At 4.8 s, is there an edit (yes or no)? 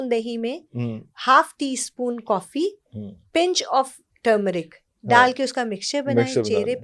no